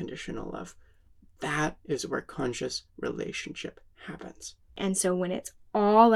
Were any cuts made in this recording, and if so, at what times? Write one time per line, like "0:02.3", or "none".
0:04.8